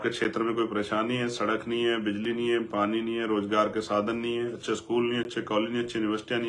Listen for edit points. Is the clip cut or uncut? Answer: uncut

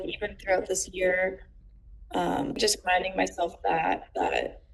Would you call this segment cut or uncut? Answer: cut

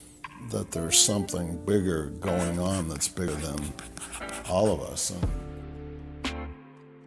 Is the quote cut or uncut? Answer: cut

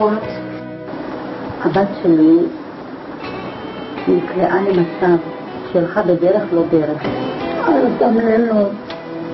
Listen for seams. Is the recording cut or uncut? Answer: uncut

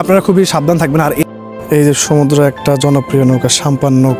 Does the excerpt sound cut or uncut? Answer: cut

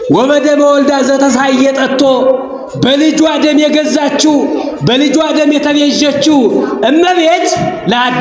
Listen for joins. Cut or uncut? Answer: uncut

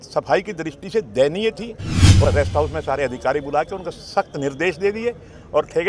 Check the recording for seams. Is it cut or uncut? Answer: cut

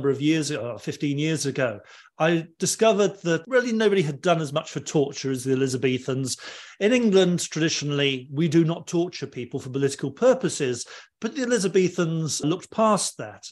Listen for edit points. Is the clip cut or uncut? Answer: uncut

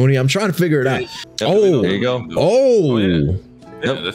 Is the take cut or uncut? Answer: cut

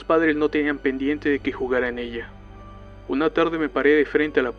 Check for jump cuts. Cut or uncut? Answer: cut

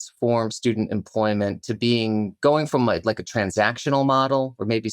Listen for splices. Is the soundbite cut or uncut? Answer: uncut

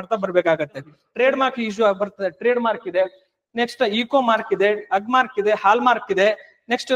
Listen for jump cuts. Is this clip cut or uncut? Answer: cut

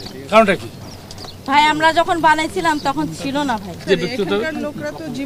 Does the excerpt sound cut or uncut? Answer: cut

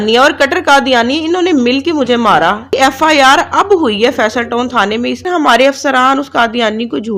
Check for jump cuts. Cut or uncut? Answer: cut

